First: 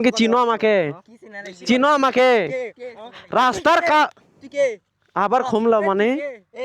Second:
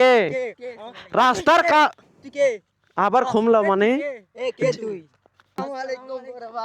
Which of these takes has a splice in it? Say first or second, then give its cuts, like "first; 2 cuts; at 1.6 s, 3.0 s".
second; 1 cut; at 5.6 s